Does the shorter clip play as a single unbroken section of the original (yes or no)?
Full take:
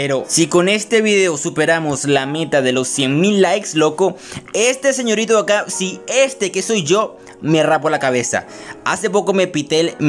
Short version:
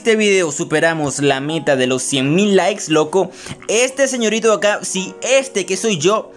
yes